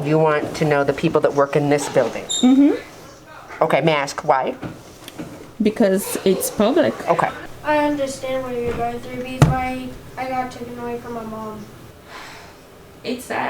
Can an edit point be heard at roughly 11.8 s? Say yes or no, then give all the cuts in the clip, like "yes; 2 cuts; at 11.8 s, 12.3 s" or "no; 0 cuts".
yes; 2 cuts; at 7.4 s, 11.8 s